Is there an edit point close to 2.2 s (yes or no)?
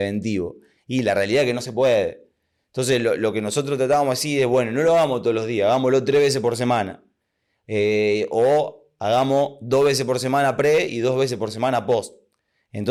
no